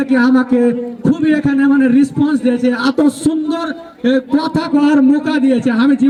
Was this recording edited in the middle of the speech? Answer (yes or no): no